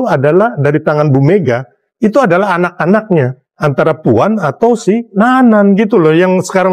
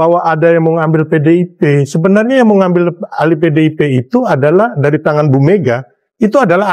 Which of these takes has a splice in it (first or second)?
first